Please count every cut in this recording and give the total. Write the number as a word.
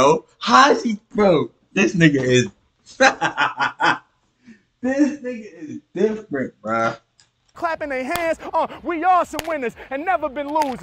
one